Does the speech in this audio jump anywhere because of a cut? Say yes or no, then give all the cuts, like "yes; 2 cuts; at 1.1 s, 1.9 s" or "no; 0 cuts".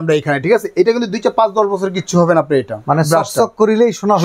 no; 0 cuts